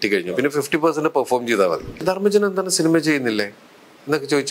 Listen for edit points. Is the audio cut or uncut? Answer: cut